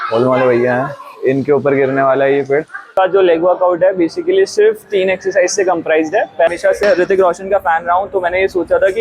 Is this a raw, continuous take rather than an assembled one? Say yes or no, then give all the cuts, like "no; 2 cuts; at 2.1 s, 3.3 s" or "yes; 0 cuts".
no; 2 cuts; at 2.9 s, 6.5 s